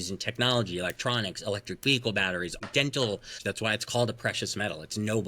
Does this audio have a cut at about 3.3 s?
yes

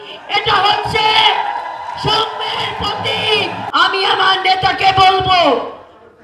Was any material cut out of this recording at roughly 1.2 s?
no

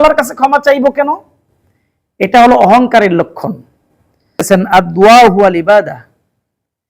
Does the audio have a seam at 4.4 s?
yes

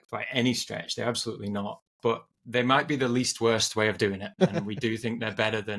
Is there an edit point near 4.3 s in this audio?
yes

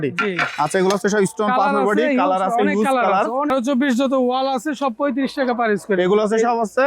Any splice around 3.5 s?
yes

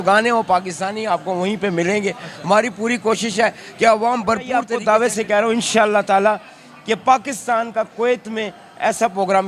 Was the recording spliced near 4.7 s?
yes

